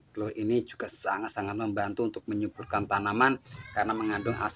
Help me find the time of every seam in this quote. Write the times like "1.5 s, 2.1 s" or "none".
3.6 s